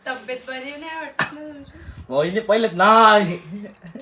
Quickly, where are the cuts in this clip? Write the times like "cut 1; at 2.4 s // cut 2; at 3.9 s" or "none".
none